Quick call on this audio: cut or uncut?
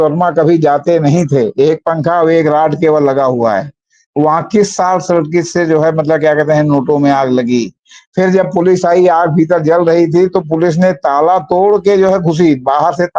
uncut